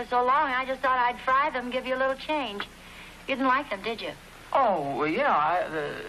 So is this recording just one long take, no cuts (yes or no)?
no